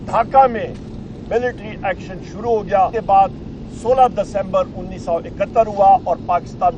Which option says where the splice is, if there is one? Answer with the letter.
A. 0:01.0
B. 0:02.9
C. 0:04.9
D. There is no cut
B